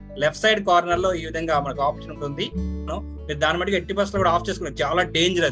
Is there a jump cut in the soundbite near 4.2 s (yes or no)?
no